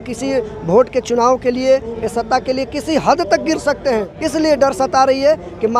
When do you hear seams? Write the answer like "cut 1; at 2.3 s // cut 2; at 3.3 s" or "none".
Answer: cut 1; at 4.2 s

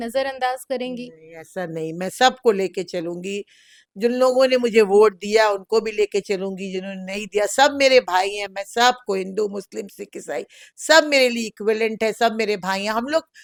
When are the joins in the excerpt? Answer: none

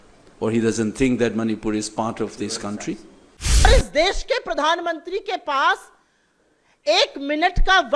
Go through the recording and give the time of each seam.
cut 1; at 3.7 s

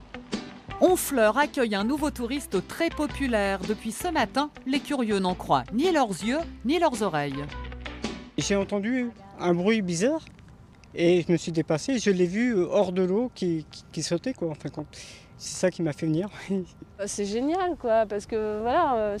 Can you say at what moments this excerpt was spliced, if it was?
none

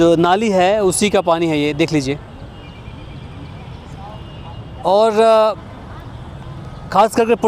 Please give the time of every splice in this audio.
none

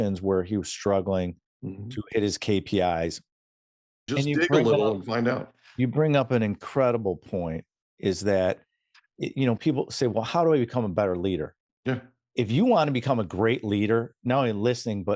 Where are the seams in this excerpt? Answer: cut 1; at 4.1 s

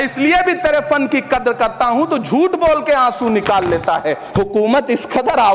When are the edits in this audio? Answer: cut 1; at 4.1 s

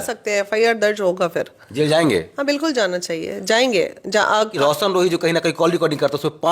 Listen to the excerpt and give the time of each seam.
cut 1; at 4.5 s

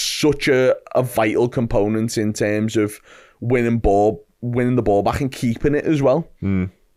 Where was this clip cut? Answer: none

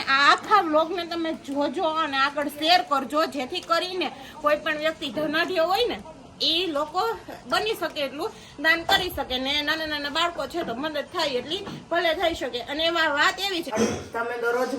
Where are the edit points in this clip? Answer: cut 1; at 13.7 s

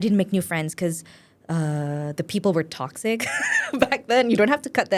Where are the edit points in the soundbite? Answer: none

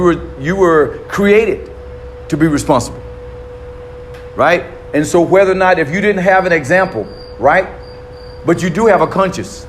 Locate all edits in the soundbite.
none

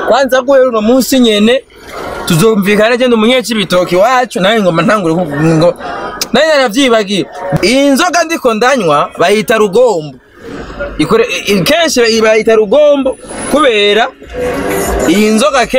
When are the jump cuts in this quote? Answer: cut 1; at 7.4 s

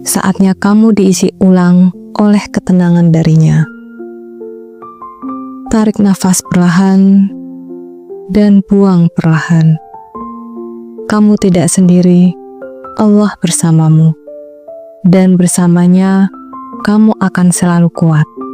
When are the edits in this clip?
none

